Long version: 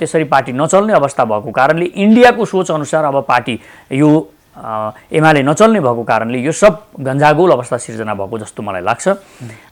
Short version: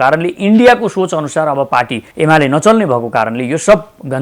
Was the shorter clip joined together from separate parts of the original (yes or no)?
yes